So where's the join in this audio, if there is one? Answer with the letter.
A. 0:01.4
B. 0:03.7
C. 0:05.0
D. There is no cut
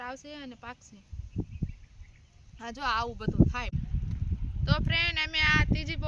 B